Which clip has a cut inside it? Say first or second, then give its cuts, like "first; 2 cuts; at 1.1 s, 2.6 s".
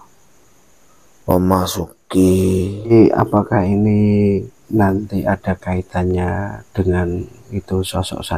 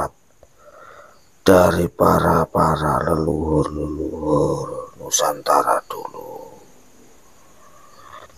first; 1 cut; at 2.9 s